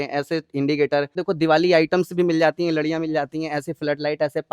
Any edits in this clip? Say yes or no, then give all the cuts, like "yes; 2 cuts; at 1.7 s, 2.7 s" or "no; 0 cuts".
yes; 1 cut; at 1.2 s